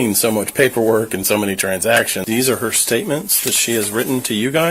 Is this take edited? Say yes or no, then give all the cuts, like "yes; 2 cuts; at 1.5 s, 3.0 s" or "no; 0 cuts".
yes; 1 cut; at 2.2 s